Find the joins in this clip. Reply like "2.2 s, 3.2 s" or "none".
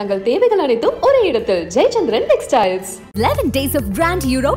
none